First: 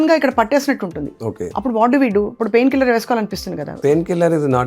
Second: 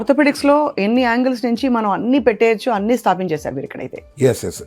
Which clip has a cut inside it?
first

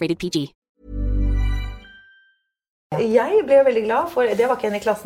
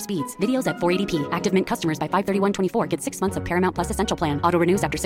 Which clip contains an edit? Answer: first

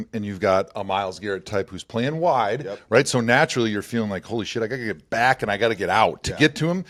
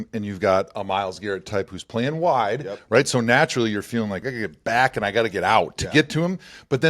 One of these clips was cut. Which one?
second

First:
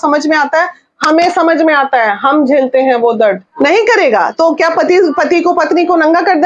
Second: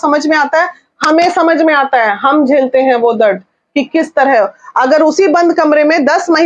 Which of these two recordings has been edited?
first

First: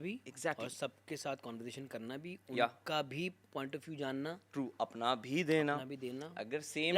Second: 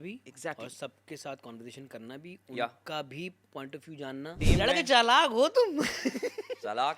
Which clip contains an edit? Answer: second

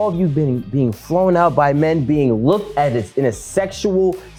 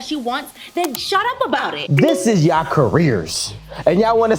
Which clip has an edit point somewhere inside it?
second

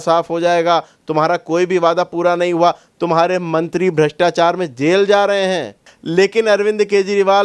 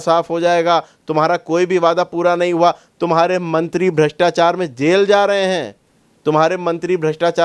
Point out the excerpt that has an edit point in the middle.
first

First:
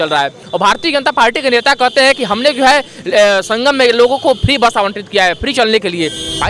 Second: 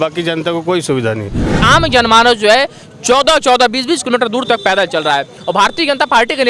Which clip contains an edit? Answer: second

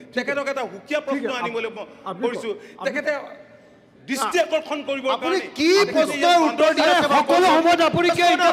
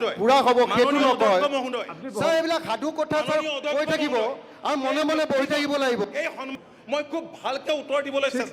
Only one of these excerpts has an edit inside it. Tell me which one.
second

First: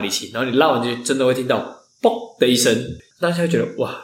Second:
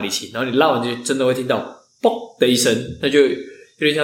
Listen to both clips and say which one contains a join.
first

